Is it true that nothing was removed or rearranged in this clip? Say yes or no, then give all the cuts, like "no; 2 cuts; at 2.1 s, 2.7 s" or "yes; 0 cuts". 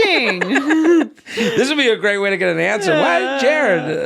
no; 1 cut; at 1.2 s